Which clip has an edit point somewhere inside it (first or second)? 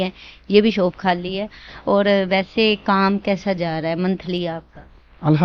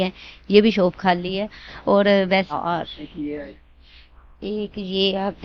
second